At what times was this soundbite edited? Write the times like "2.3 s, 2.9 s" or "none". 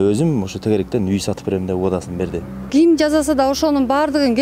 2.7 s